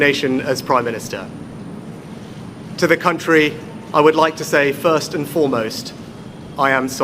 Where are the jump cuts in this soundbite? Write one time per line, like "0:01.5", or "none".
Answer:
0:02.9